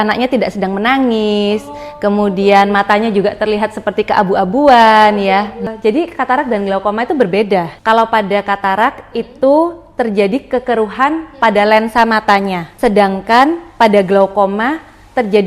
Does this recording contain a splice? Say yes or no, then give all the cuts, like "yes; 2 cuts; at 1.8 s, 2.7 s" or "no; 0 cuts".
yes; 3 cuts; at 5.7 s, 7.7 s, 12.6 s